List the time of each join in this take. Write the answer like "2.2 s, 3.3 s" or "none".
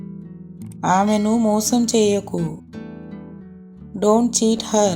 0.8 s, 2.6 s, 3.9 s